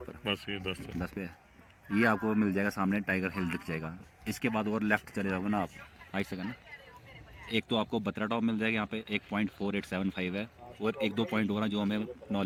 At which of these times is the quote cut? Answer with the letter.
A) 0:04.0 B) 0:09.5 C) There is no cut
C